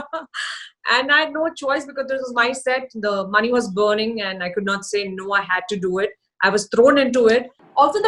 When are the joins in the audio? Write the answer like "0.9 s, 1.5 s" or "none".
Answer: none